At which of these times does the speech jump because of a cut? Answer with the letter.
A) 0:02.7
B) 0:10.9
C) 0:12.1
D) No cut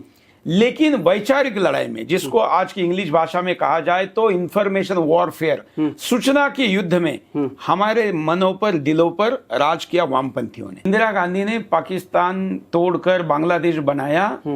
B